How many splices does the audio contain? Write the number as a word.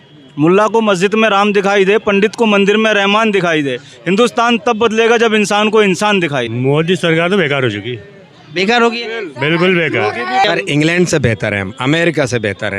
two